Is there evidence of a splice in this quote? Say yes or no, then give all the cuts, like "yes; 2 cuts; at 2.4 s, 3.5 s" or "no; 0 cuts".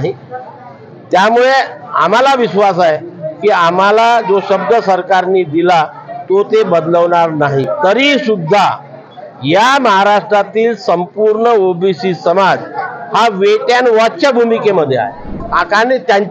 yes; 1 cut; at 15.4 s